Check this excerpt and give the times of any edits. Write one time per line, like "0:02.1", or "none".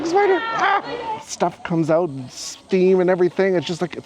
0:00.9